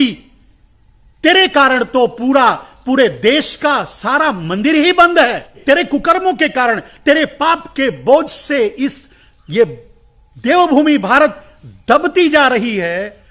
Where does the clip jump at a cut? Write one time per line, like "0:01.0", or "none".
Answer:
0:05.6